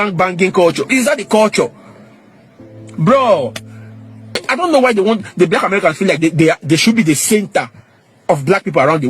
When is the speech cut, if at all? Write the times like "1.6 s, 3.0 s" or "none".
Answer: 4.4 s